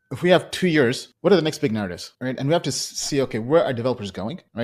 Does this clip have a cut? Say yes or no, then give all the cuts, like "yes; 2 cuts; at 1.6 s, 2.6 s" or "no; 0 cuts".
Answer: no; 0 cuts